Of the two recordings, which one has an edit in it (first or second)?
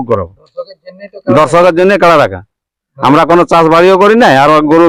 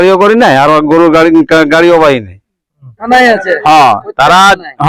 second